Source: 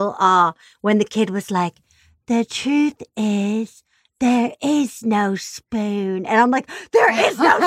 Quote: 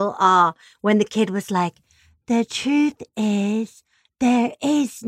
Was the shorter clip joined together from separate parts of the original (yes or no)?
no